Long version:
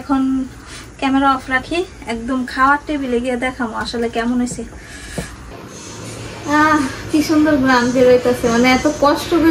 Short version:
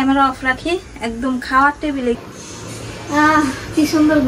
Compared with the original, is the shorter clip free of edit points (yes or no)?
no